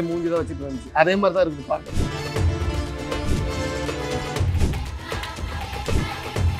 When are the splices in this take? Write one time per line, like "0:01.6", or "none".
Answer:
none